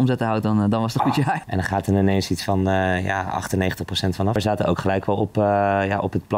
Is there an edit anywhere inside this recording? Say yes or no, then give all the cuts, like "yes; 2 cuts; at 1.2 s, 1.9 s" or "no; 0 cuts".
yes; 2 cuts; at 1.4 s, 4.3 s